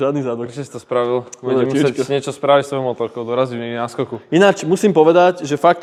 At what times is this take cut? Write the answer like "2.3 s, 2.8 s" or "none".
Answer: none